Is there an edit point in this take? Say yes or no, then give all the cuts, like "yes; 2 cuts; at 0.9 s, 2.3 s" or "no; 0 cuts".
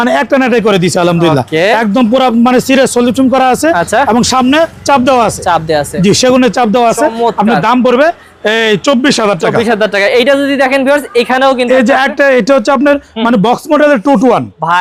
no; 0 cuts